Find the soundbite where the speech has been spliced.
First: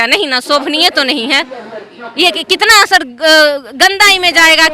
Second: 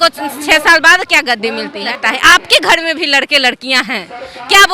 second; 1 cut; at 1.9 s

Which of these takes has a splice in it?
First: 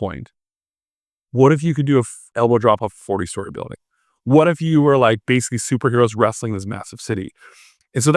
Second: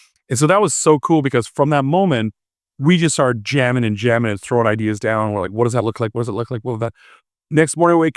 first; 1 cut; at 2.3 s

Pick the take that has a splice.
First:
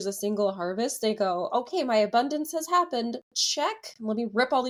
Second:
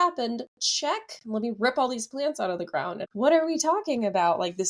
second; 1 cut; at 3.1 s

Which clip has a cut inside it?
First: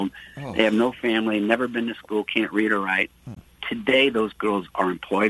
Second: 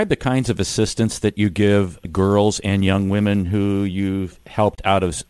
second; 1 cut; at 2.0 s

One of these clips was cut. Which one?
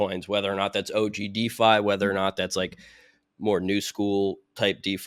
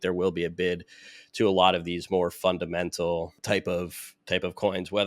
second; 1 cut; at 3.4 s

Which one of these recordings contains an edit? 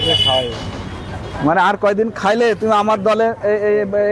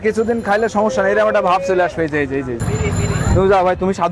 second; 1 cut; at 2.6 s

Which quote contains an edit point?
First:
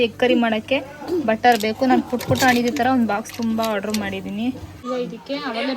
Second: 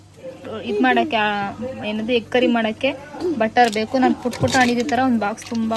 first; 1 cut; at 4.7 s

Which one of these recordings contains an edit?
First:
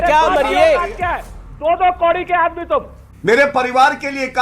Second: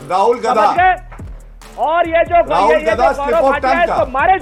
first; 2 cuts; at 1.3 s, 3.0 s

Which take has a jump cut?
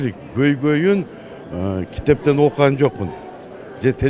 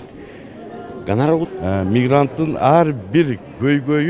second; 1 cut; at 1.4 s

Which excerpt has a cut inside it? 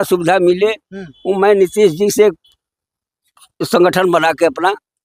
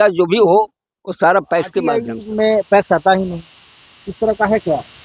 second; 1 cut; at 2.2 s

